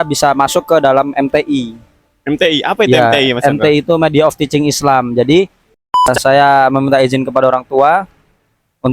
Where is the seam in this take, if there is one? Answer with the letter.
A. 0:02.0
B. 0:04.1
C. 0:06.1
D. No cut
C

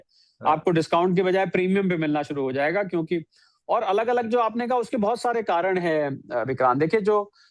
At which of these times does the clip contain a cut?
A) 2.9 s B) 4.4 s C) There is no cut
C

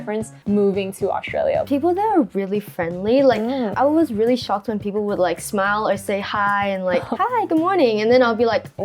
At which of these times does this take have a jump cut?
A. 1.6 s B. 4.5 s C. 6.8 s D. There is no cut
A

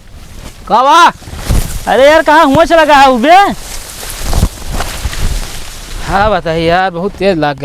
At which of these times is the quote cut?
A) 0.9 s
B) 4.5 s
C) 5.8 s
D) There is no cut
D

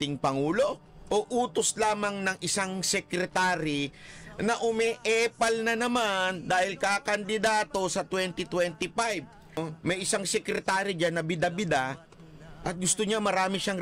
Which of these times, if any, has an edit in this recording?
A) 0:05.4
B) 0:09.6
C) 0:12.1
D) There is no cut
B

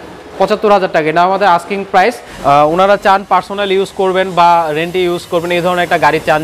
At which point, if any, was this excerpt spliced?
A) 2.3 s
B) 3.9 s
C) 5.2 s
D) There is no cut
A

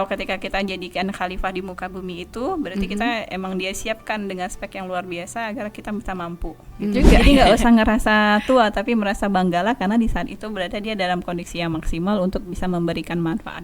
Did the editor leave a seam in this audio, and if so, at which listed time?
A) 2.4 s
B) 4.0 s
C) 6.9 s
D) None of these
C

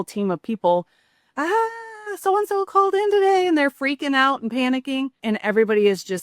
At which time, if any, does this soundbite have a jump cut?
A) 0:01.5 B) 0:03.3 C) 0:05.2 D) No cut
C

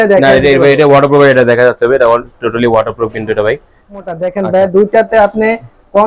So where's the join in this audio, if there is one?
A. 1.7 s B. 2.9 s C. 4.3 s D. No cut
C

